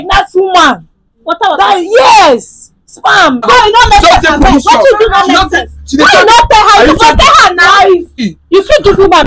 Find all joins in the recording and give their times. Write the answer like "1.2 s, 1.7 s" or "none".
3.5 s, 8.2 s